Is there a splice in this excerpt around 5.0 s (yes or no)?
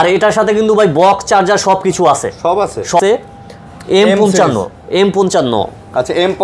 no